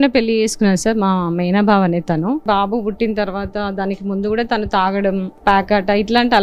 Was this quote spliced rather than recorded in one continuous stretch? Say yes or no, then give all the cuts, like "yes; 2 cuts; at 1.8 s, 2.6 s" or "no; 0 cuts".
yes; 2 cuts; at 2.4 s, 5.3 s